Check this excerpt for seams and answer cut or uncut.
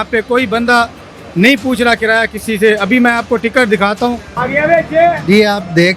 cut